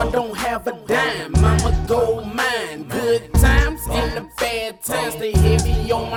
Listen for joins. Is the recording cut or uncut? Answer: uncut